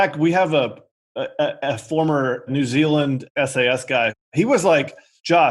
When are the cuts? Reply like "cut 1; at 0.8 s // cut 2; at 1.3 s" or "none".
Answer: cut 1; at 2.5 s // cut 2; at 3.3 s // cut 3; at 4.3 s